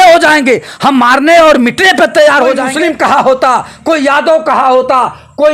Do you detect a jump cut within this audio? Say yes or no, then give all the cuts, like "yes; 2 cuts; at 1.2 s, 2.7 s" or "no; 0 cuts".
yes; 1 cut; at 2.7 s